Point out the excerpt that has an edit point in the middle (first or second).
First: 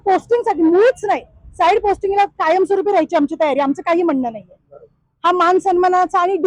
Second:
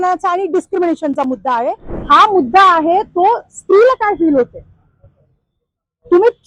second